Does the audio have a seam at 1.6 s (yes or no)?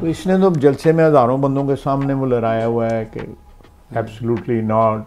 no